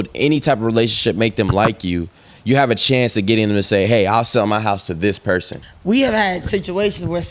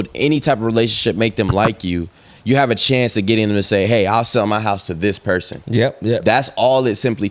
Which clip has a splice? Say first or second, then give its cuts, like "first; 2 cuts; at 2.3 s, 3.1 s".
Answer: first; 1 cut; at 5.6 s